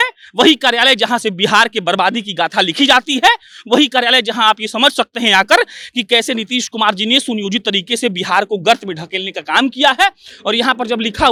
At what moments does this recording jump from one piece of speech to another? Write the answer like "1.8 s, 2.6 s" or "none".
none